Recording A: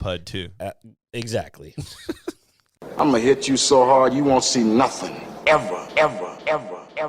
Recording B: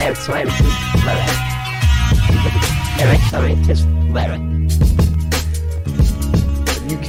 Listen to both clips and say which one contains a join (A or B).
A